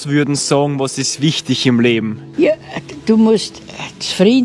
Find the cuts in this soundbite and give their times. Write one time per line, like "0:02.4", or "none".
0:02.2

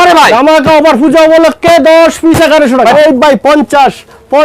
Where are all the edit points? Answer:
0:02.9

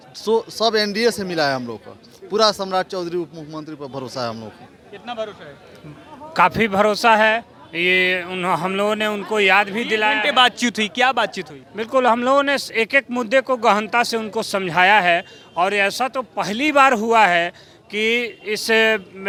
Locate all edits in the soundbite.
none

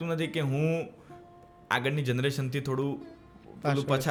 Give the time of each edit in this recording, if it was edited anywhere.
none

